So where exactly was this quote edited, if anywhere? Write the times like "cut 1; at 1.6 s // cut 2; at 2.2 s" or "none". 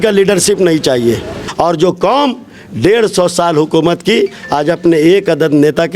cut 1; at 1.4 s